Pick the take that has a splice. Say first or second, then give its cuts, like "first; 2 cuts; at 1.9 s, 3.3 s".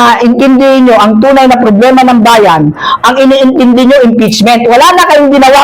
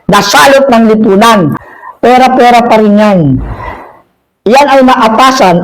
second; 1 cut; at 1.6 s